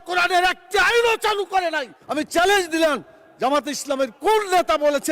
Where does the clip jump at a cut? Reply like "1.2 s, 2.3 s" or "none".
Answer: 1.9 s